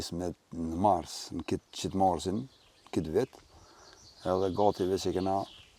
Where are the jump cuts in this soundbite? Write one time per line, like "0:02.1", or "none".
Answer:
none